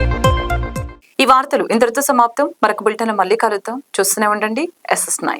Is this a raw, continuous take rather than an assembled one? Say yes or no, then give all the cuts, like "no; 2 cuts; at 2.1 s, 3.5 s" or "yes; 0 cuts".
yes; 0 cuts